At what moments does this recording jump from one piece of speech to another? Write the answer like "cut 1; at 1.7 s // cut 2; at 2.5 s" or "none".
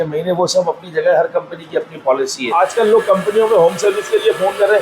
cut 1; at 2.5 s